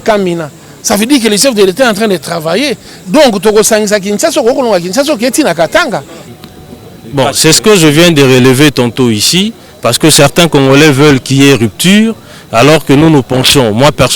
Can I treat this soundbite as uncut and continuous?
no; 1 cut; at 6.2 s

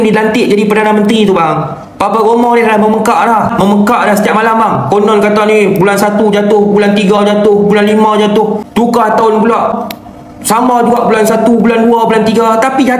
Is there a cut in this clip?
yes; 3 cuts; at 3.5 s, 8.6 s, 9.8 s

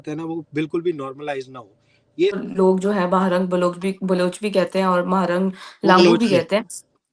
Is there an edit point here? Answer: yes; 1 cut; at 2.4 s

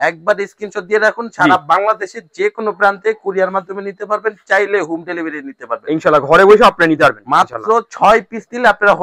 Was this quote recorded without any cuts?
yes; 0 cuts

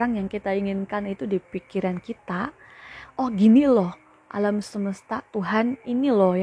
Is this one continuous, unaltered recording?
yes; 0 cuts

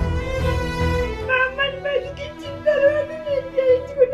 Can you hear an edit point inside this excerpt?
yes; 1 cut; at 1.2 s

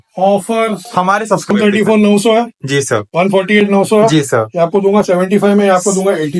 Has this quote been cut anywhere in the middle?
yes; 1 cut; at 1.5 s

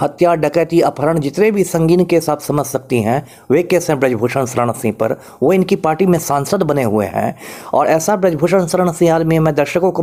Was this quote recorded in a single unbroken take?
yes; 0 cuts

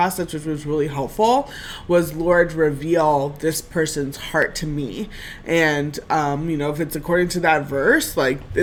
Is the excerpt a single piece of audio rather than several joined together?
yes; 0 cuts

